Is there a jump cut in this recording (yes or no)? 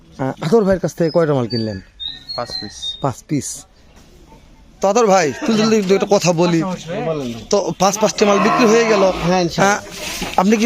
yes